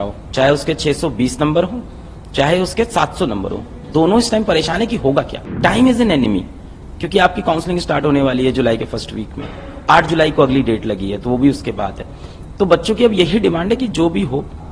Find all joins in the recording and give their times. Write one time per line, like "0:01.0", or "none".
0:05.4